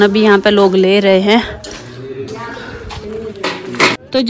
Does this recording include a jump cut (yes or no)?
no